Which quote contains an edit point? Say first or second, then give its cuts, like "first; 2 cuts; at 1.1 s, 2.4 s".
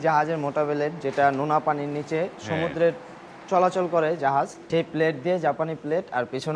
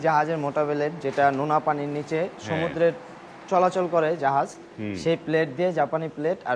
first; 1 cut; at 4.6 s